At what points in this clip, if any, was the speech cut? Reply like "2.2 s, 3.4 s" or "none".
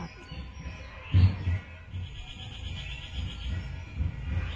1.9 s